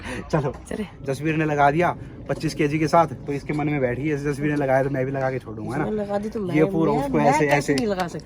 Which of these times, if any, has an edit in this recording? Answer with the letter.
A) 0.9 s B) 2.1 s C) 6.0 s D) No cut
A